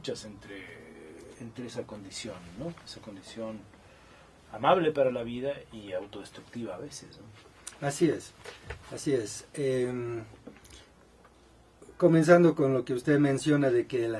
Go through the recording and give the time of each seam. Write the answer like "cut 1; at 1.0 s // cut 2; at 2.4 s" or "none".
cut 1; at 1.6 s